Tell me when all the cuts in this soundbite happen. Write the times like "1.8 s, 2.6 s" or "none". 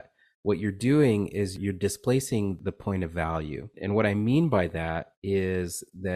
1.6 s, 2.6 s, 3.8 s